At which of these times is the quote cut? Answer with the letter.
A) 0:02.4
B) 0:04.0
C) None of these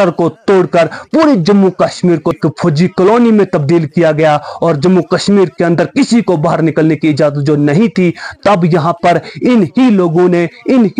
A